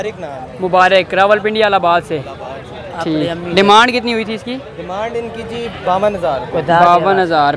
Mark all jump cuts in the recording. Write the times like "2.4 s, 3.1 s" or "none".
none